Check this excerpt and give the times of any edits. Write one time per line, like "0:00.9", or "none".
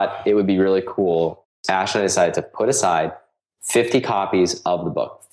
0:01.4